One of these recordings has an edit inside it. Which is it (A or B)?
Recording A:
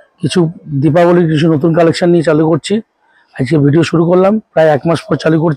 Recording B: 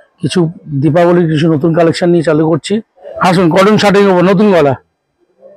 B